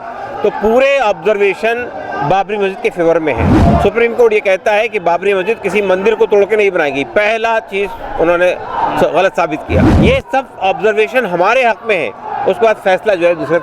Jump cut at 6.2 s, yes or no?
no